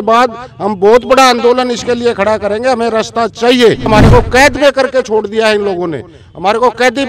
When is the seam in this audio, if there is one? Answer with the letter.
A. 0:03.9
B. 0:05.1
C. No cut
A